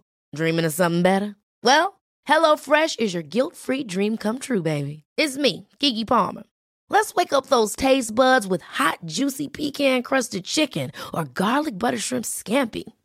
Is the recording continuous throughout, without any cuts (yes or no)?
yes